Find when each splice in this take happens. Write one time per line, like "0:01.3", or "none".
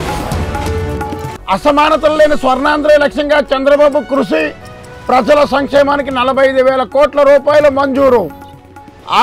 0:00.9